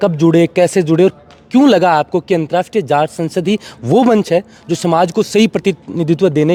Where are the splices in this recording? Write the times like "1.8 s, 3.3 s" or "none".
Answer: none